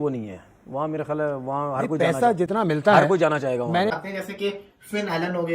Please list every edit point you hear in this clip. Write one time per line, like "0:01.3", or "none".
0:04.0